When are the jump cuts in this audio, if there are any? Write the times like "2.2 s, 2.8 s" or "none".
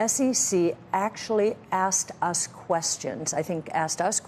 none